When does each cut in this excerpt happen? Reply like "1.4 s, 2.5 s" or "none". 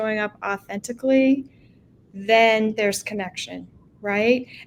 none